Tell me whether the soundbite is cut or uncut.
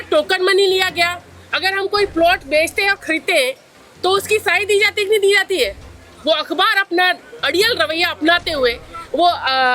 cut